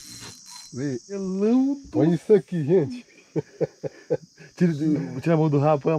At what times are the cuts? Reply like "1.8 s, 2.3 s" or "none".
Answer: 1.1 s